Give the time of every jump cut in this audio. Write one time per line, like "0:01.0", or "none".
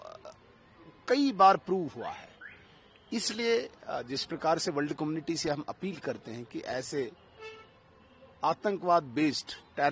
none